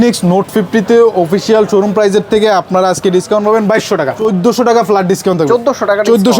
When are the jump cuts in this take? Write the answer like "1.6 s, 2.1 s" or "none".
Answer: 4.2 s